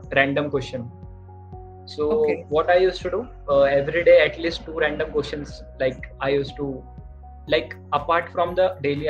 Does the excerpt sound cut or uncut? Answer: uncut